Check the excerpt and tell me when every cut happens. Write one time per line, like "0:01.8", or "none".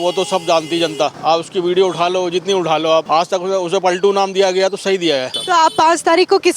0:01.2
0:03.1
0:05.3